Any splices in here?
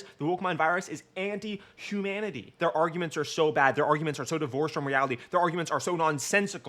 yes; 1 cut; at 2.5 s

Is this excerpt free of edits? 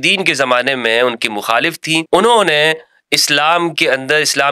no; 1 cut; at 2.0 s

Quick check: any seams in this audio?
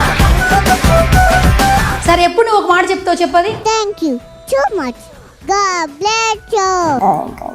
no; 0 cuts

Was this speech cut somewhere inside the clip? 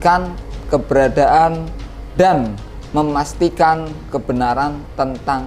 no; 0 cuts

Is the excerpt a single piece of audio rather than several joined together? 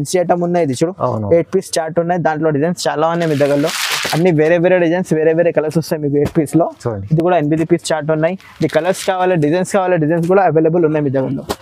yes; 0 cuts

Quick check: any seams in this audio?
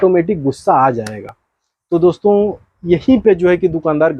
no; 0 cuts

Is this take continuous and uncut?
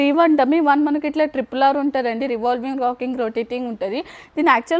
yes; 0 cuts

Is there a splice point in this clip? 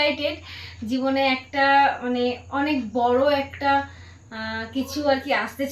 no; 0 cuts

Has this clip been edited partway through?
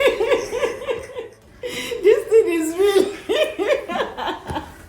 yes; 1 cut; at 1.2 s

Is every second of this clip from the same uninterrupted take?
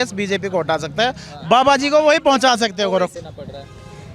no; 1 cut; at 3.2 s

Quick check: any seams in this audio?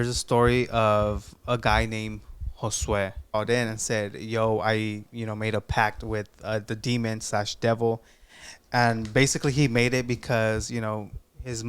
yes; 1 cut; at 3.3 s

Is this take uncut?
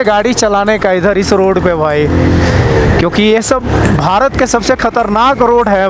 yes; 0 cuts

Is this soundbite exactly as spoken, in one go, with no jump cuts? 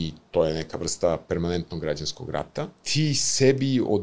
no; 1 cut; at 2.8 s

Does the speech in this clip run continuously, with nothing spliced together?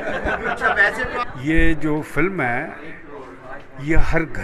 no; 1 cut; at 1.2 s

